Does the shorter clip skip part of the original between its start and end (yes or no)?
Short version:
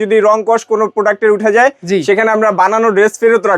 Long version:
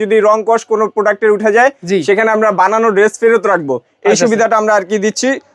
no